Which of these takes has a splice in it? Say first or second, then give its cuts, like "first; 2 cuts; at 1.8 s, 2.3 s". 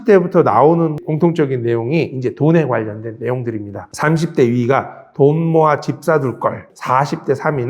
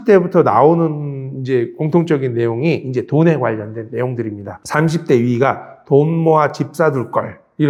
first; 2 cuts; at 1.0 s, 6.7 s